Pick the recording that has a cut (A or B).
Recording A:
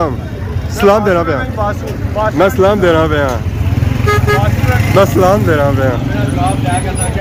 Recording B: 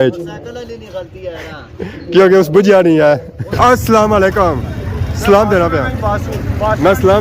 B